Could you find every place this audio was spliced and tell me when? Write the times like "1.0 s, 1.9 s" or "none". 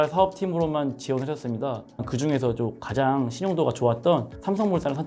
2.1 s

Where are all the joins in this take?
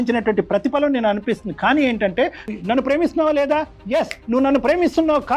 2.5 s

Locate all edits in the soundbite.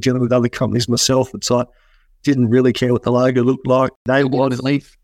none

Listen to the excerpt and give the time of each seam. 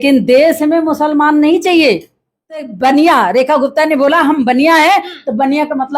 2.7 s

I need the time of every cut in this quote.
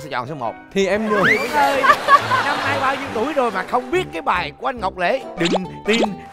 1.4 s

